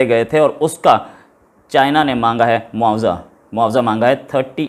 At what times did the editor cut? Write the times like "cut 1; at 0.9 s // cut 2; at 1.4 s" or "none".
none